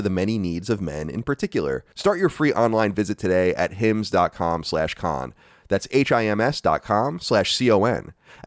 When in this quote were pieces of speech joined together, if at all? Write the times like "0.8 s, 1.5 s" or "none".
1.9 s